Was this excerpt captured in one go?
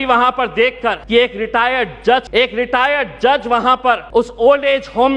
no; 3 cuts; at 1.0 s, 2.3 s, 4.0 s

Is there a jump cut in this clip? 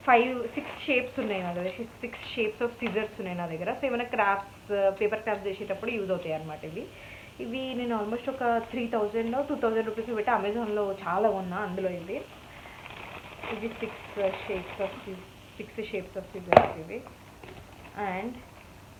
no; 0 cuts

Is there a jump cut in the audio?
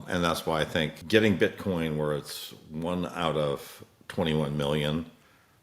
yes; 1 cut; at 1.0 s

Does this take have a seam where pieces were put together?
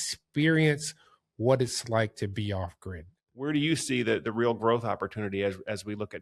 yes; 1 cut; at 3.4 s

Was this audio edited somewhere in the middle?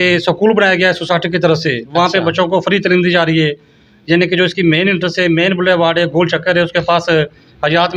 no; 0 cuts

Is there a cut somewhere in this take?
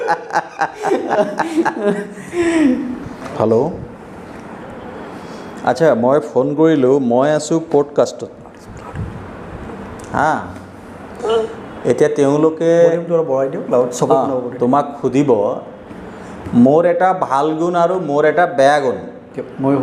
no; 0 cuts

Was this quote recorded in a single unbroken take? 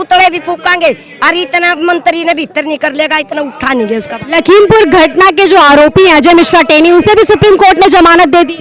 yes; 0 cuts

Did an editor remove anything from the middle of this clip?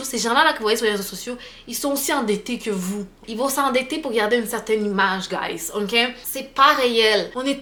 no; 0 cuts

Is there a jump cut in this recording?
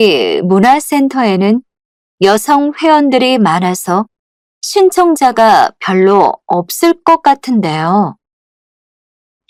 no; 0 cuts

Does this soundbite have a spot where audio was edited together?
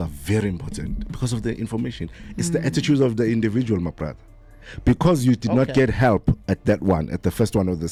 no; 0 cuts

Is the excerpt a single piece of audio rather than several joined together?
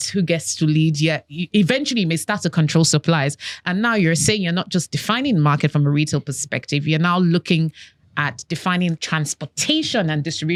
yes; 0 cuts

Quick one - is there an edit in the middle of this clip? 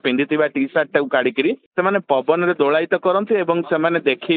yes; 1 cut; at 1.6 s

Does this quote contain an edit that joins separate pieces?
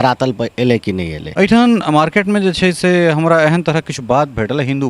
yes; 1 cut; at 1.2 s

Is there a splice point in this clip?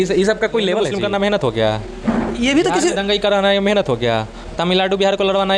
yes; 1 cut; at 0.9 s

